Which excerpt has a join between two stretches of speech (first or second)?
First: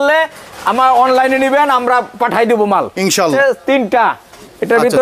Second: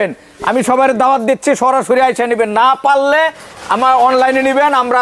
first